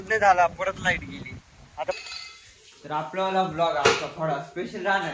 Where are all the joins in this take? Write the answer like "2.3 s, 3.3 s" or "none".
2.0 s

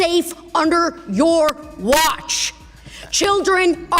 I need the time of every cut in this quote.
none

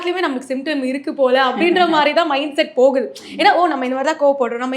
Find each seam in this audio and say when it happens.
none

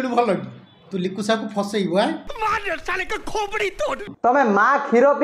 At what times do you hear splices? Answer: 2.3 s, 4.1 s

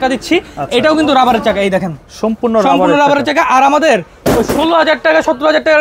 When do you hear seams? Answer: none

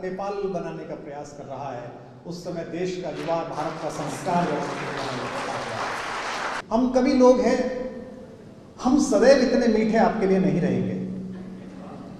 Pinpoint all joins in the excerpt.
6.6 s

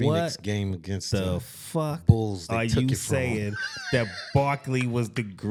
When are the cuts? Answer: none

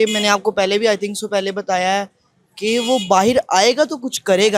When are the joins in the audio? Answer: none

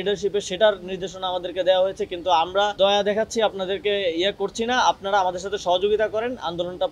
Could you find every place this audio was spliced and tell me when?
none

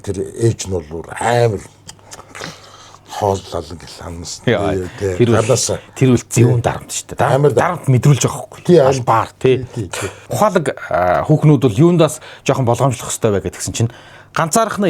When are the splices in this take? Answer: 10.3 s

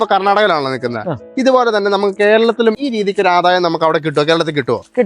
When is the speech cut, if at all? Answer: 2.8 s

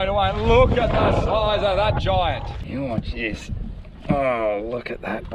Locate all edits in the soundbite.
2.5 s

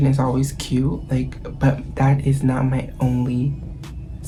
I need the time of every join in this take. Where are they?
none

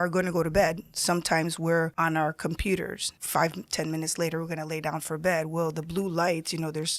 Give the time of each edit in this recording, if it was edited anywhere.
1.9 s, 3.1 s

